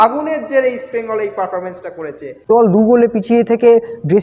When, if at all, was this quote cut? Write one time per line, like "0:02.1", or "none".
0:02.5